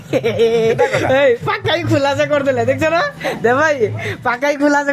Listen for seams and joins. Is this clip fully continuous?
yes; 0 cuts

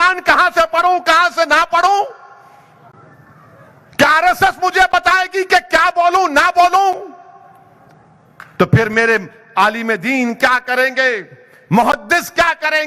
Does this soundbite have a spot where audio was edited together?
no; 0 cuts

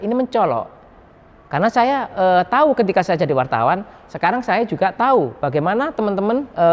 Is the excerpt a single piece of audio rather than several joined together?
yes; 0 cuts

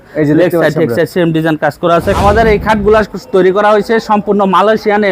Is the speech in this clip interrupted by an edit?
yes; 1 cut; at 2.2 s

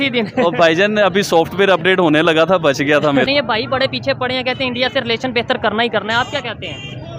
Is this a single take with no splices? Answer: no; 1 cut; at 3.3 s

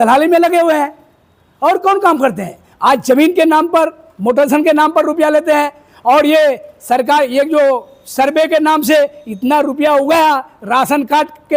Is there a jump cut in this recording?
no; 0 cuts

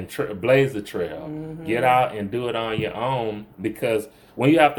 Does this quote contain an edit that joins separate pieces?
no; 0 cuts

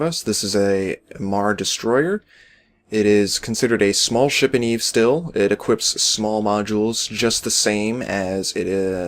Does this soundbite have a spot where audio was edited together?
yes; 1 cut; at 7.5 s

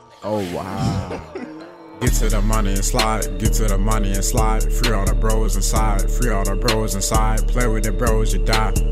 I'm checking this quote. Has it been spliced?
yes; 1 cut; at 1.8 s

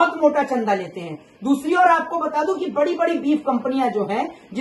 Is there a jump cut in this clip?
no; 0 cuts

